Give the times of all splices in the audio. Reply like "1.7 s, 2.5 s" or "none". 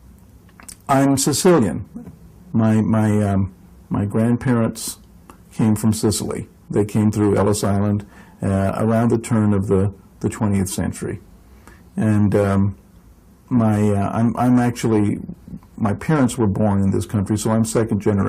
11.2 s

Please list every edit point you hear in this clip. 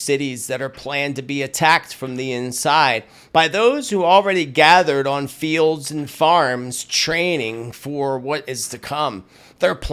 none

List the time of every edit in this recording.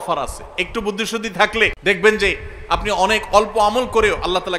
1.8 s

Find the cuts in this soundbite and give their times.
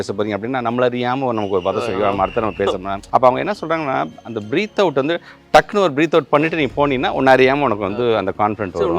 2.9 s

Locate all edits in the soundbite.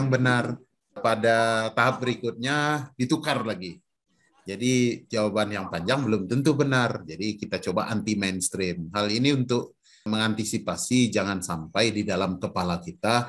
1.0 s

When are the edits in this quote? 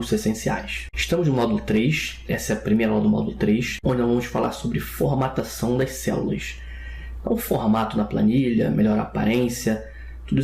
none

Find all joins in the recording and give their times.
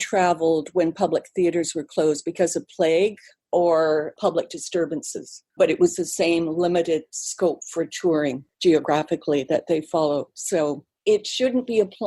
5.6 s, 8.5 s, 10.9 s

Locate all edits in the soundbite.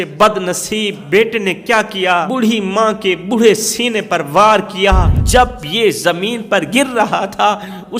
1.0 s, 2.3 s, 5.1 s

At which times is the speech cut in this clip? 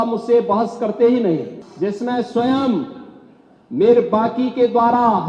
1.6 s

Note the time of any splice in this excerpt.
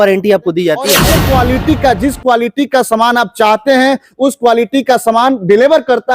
1.0 s

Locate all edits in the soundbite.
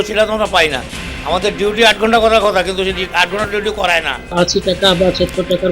4.3 s

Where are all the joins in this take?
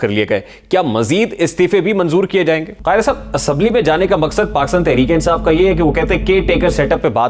2.7 s

